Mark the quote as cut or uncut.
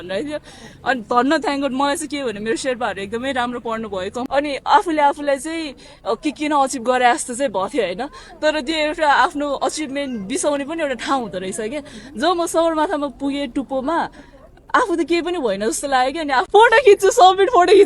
cut